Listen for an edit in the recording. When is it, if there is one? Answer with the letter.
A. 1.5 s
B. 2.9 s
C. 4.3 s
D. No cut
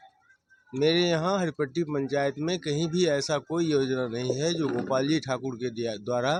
D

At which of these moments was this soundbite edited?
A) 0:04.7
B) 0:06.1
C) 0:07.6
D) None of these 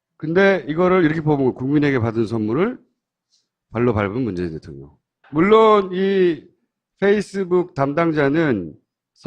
B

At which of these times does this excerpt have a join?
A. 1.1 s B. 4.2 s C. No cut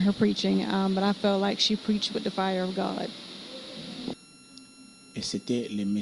B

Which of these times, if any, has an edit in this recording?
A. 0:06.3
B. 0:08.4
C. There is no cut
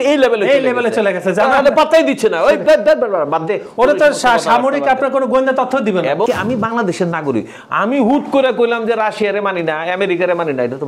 A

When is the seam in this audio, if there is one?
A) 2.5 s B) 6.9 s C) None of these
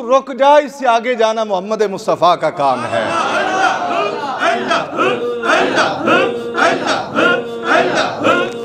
C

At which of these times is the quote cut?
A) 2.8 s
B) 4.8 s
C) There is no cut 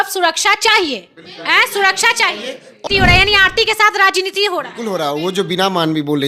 A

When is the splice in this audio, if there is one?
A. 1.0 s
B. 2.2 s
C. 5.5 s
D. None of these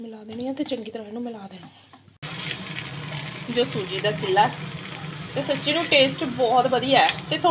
B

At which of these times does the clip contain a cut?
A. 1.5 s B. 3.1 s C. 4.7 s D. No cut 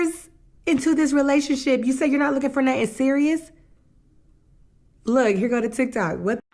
D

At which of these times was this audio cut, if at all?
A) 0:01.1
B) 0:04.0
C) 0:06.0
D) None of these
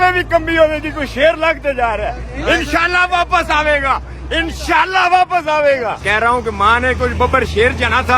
C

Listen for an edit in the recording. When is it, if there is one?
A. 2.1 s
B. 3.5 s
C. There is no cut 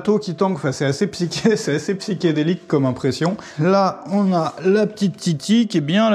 B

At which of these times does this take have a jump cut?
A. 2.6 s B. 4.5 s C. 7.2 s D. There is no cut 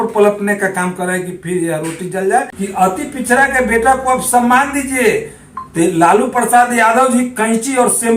A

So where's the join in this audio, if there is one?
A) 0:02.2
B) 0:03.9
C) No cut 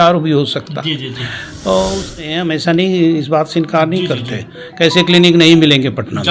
A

